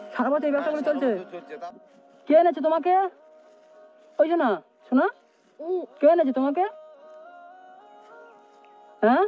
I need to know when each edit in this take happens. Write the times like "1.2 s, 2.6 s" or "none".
1.4 s